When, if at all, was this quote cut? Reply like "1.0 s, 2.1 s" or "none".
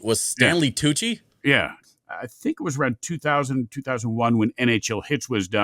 1.8 s